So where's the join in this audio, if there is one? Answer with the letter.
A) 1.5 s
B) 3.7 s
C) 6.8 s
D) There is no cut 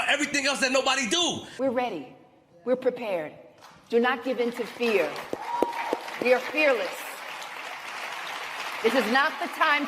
A